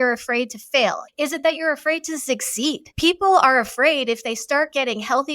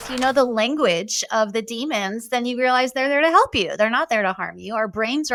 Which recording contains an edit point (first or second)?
first